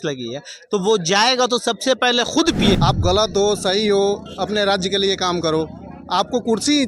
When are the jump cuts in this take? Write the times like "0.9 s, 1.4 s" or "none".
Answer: 2.8 s